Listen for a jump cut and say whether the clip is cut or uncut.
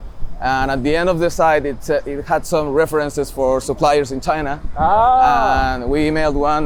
uncut